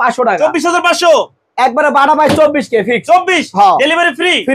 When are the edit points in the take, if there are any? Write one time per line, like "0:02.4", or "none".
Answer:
none